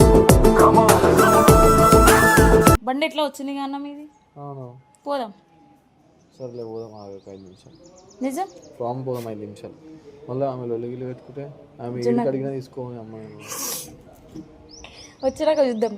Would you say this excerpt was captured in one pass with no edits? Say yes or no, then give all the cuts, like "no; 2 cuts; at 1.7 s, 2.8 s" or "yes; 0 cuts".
no; 1 cut; at 2.8 s